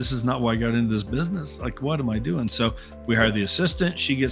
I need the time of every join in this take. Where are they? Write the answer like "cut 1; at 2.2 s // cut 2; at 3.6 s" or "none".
none